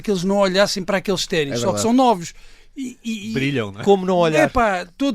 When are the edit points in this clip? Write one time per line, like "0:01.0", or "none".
none